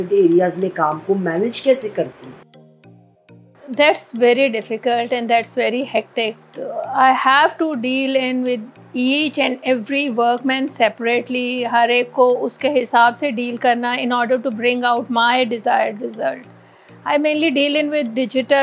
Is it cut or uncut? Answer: uncut